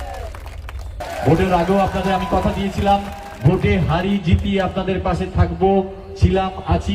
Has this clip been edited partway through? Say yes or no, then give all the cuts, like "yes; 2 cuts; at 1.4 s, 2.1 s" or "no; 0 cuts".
yes; 1 cut; at 1.0 s